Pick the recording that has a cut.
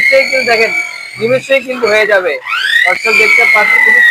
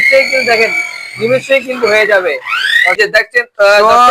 second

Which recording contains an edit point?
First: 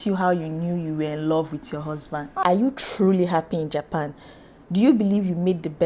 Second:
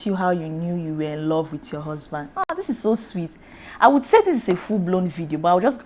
first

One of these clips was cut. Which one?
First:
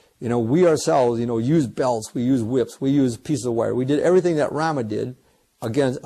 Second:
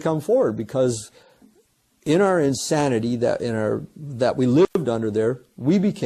second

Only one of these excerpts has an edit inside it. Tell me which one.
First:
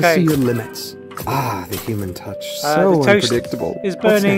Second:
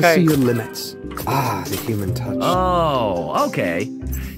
second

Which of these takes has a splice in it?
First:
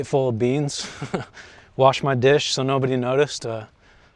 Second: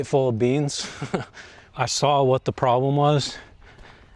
second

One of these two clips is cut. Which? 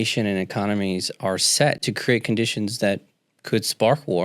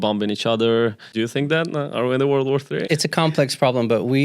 second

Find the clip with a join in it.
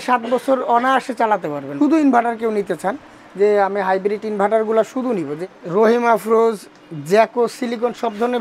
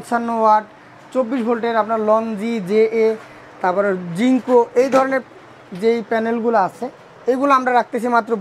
first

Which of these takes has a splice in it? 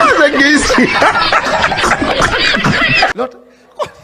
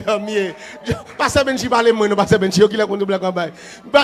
first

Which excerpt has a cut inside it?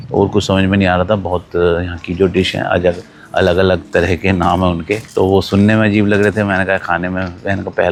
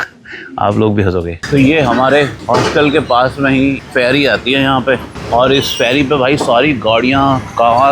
second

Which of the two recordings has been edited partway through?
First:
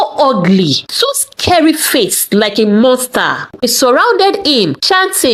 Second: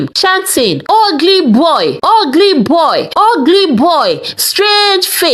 first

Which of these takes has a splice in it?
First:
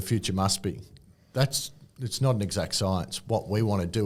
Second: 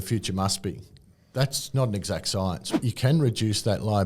second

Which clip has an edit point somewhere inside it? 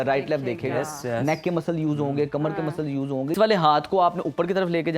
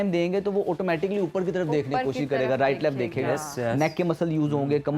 first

